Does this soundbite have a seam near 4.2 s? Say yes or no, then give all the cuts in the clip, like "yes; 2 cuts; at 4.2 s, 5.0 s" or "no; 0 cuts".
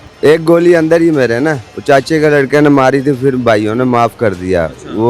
no; 1 cut; at 1.7 s